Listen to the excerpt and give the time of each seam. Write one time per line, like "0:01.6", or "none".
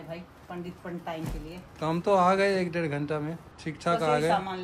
none